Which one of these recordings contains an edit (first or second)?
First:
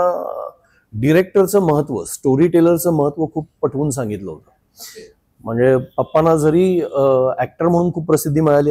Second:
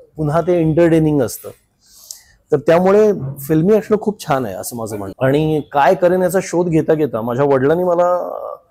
second